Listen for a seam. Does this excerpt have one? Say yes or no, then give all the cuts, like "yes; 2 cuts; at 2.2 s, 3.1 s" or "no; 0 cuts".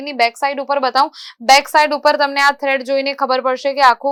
no; 0 cuts